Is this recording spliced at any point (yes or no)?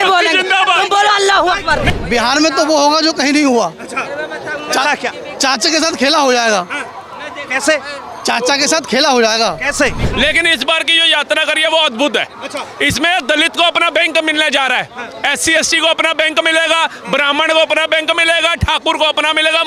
yes